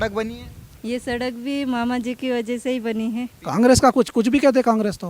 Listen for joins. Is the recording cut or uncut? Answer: cut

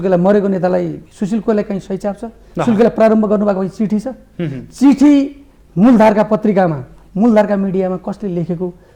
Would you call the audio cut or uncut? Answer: uncut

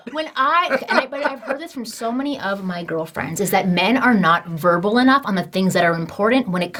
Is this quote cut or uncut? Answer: uncut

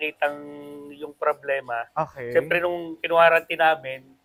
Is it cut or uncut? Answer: uncut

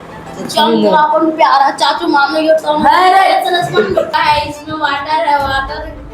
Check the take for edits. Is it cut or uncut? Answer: cut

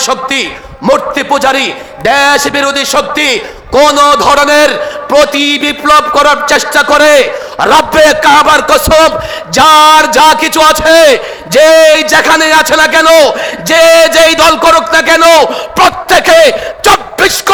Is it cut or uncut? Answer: uncut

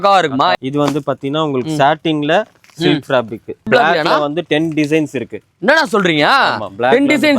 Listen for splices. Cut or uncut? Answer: cut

